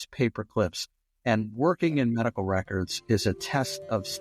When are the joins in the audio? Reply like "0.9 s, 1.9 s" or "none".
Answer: none